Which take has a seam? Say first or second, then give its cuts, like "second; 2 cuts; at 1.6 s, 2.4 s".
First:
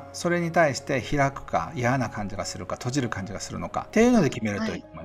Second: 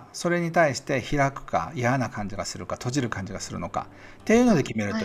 first; 1 cut; at 3.9 s